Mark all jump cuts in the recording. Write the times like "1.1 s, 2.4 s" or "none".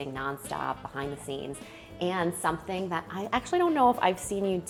none